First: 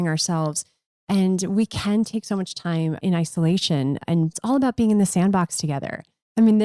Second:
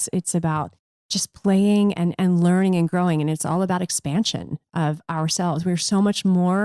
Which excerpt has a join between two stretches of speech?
first; 2 cuts; at 3.0 s, 4.4 s

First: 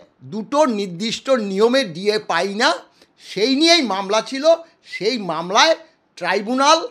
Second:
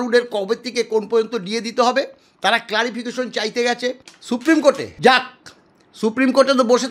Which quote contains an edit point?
second; 2 cuts; at 4.1 s, 4.9 s

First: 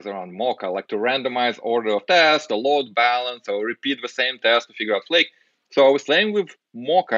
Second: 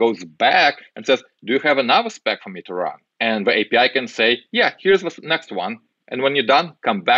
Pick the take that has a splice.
second; 1 cut; at 3.1 s

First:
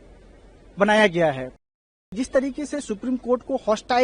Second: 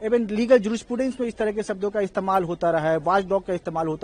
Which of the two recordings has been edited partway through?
first; 1 cut; at 1.6 s

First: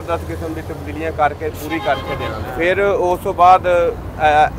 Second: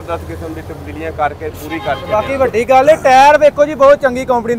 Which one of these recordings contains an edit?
second; 1 cut; at 2.0 s

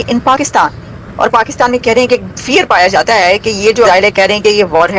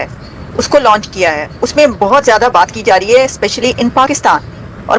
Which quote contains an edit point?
first; 1 cut; at 3.9 s

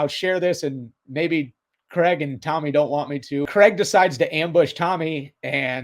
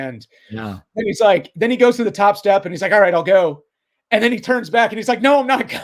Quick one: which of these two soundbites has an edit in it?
first; 1 cut; at 3.5 s

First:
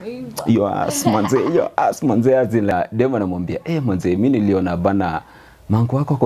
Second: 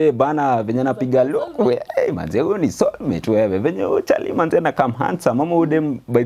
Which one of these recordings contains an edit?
first; 1 cut; at 2.7 s

